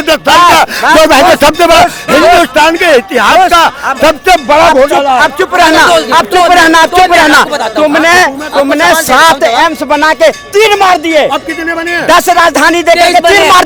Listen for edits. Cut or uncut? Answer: uncut